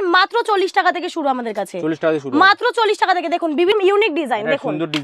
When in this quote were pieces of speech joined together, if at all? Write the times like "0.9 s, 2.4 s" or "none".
3.7 s